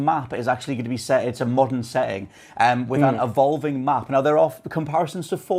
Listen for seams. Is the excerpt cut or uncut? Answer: uncut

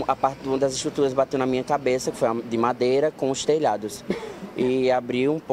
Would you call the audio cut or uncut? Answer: uncut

